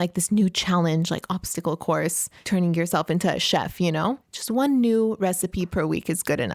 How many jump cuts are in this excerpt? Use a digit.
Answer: 2